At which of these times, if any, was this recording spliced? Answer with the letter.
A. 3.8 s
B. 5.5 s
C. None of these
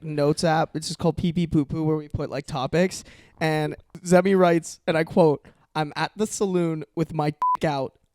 A